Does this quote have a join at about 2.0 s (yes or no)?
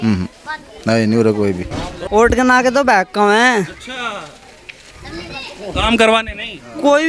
yes